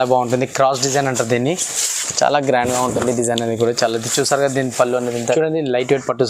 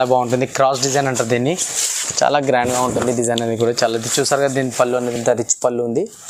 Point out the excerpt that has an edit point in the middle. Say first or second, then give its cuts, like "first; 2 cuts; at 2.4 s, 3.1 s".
first; 1 cut; at 5.2 s